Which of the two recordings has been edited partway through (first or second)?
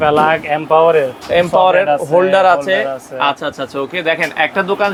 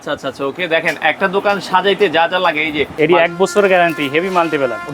second